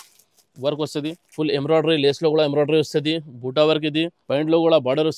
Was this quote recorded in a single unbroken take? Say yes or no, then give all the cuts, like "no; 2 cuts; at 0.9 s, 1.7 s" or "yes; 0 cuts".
no; 2 cuts; at 1.2 s, 4.2 s